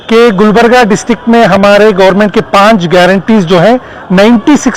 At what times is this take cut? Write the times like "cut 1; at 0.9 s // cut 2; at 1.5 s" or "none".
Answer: none